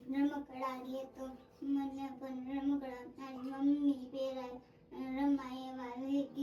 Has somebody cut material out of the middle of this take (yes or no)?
no